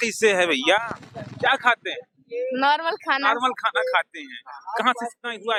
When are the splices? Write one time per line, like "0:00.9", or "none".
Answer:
none